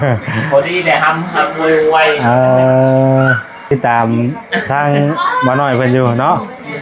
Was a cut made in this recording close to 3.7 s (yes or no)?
yes